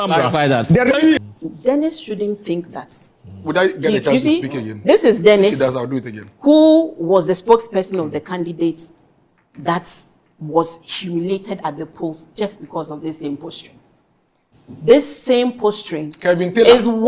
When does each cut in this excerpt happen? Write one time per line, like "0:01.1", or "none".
0:01.2